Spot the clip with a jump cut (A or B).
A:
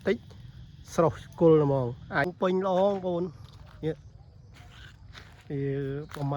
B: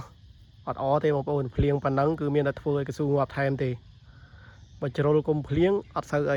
A